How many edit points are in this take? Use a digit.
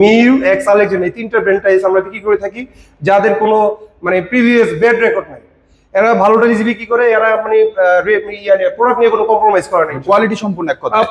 0